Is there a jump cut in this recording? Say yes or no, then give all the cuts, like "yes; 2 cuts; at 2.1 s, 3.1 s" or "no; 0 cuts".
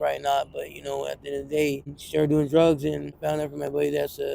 yes; 2 cuts; at 2.0 s, 3.2 s